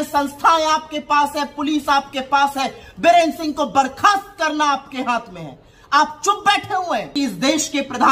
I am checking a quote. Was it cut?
yes; 1 cut; at 7.1 s

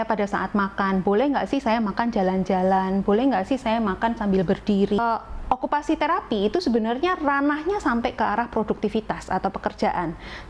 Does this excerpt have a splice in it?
yes; 1 cut; at 5.0 s

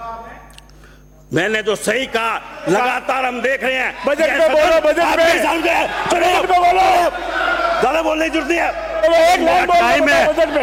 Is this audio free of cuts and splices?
yes; 0 cuts

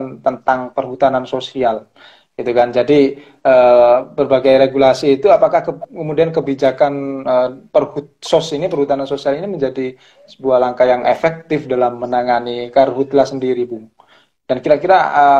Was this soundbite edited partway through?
no; 0 cuts

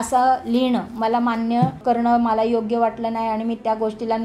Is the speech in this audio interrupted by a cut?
yes; 1 cut; at 1.8 s

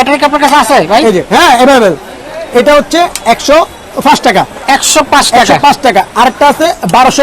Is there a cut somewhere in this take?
no; 0 cuts

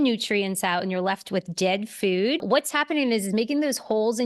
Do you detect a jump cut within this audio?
yes; 1 cut; at 2.4 s

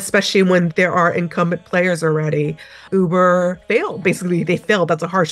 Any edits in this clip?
yes; 2 cuts; at 2.9 s, 4.0 s

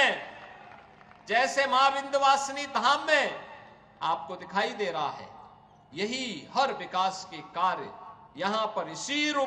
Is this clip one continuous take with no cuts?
yes; 0 cuts

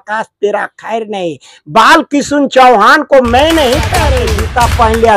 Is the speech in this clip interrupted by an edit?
yes; 1 cut; at 4.2 s

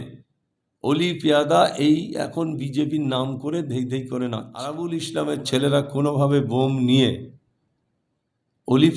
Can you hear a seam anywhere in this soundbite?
yes; 1 cut; at 4.7 s

